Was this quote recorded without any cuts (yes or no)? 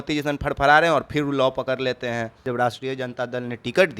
no